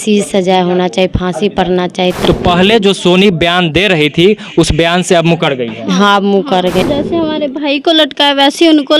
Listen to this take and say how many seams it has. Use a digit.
2